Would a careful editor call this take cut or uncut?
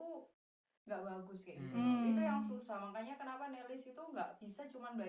uncut